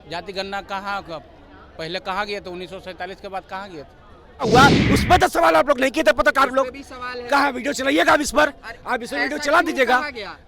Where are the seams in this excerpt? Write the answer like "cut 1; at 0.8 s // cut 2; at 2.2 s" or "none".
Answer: cut 1; at 4.5 s